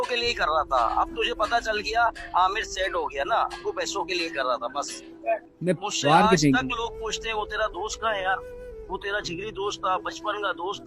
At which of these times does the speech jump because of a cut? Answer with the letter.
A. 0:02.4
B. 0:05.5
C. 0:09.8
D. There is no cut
B